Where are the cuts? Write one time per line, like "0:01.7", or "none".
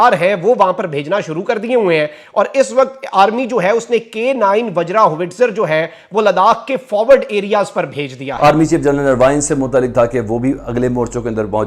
0:08.2

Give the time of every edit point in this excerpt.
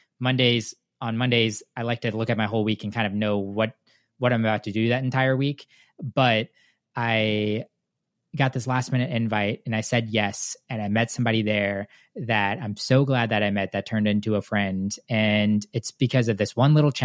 none

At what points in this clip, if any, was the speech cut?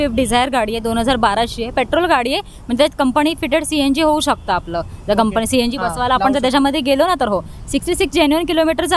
none

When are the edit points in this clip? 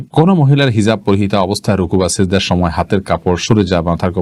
none

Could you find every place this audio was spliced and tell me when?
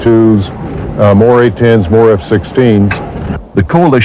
0:01.3

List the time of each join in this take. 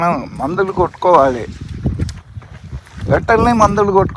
none

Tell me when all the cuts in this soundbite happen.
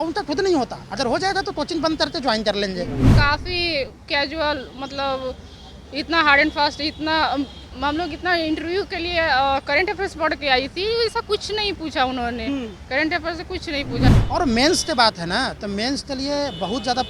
0:03.1
0:14.0

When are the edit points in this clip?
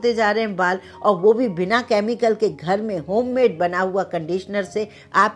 none

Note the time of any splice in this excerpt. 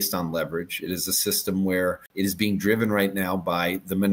0:02.0

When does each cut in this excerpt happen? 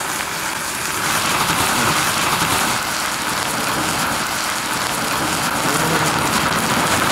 0:01.0

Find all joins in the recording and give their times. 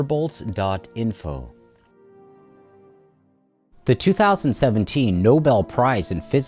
0:04.0

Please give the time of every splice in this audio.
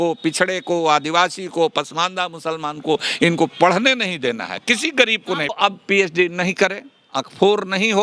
0:05.5

